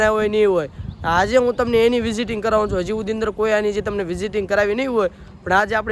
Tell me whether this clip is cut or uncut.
uncut